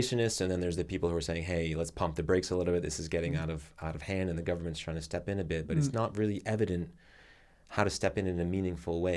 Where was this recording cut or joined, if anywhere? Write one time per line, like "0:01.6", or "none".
none